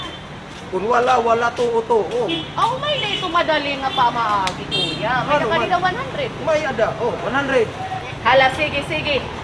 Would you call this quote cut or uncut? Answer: cut